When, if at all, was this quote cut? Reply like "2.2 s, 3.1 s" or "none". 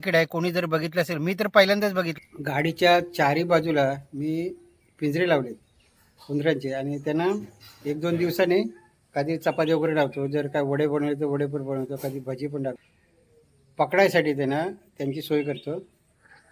2.1 s, 12.8 s